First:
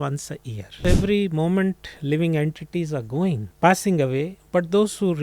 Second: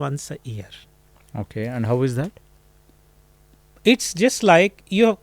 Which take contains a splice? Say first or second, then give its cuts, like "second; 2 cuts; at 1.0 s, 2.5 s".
first; 2 cuts; at 0.8 s, 3.5 s